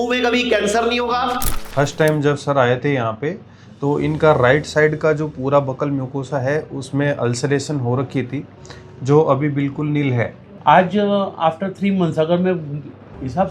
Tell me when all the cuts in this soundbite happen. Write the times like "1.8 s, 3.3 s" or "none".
1.5 s, 10.5 s